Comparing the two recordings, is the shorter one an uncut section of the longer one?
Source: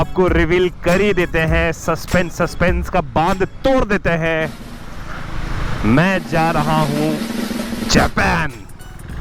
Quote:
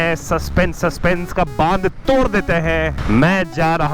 no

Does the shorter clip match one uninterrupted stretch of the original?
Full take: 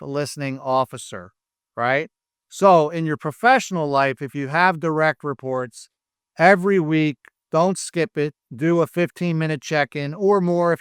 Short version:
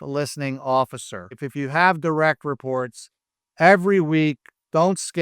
no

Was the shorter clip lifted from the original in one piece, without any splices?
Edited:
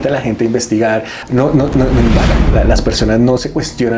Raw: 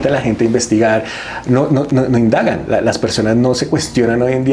no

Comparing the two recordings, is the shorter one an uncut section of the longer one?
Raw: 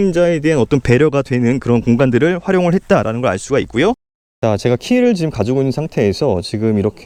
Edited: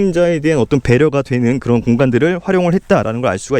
yes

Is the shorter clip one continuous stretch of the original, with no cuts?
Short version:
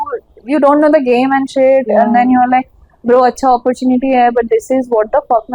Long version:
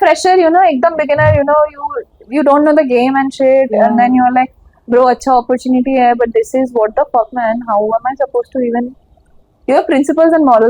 yes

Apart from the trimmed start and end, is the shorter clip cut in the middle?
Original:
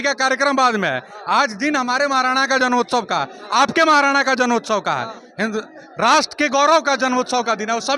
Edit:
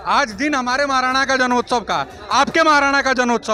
no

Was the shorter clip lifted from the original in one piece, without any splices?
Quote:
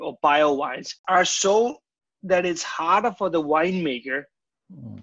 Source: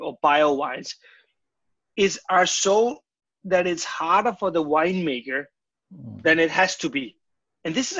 no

